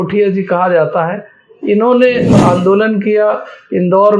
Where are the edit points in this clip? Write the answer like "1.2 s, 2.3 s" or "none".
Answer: 2.4 s